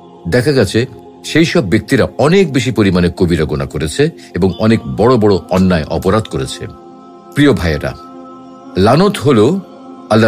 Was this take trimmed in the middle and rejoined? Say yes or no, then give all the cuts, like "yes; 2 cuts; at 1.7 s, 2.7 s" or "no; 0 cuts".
no; 0 cuts